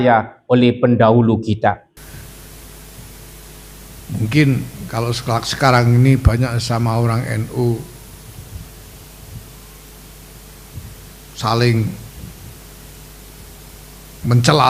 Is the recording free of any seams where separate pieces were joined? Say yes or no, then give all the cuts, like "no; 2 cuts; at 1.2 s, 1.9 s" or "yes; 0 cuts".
no; 1 cut; at 2.0 s